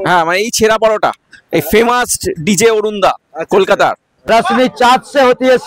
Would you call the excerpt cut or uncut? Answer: cut